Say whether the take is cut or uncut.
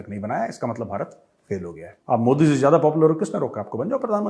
cut